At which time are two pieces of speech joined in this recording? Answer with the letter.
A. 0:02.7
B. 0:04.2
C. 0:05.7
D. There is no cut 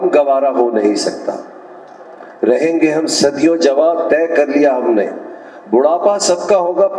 D